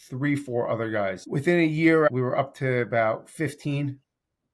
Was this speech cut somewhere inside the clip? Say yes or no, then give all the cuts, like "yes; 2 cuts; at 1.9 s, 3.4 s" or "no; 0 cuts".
yes; 2 cuts; at 1.2 s, 2.1 s